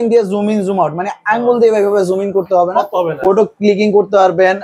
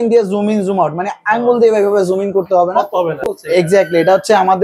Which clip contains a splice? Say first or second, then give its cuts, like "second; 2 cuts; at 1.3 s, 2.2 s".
second; 1 cut; at 3.2 s